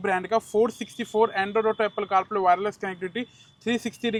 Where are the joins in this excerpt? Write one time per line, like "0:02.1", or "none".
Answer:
none